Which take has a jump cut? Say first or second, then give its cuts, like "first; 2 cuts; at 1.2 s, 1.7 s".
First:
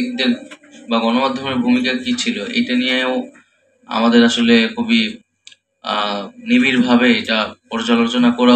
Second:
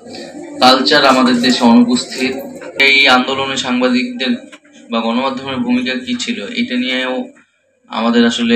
second; 1 cut; at 2.7 s